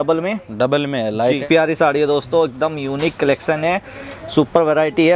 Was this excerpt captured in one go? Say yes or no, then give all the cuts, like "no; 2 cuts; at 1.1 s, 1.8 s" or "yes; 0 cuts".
no; 1 cut; at 1.4 s